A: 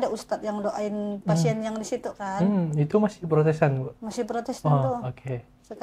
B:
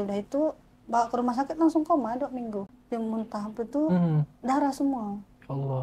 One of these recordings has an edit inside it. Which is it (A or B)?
B